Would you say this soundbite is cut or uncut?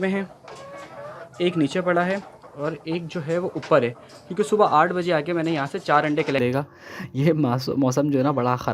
cut